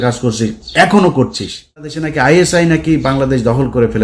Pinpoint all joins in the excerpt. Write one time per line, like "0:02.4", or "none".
0:02.0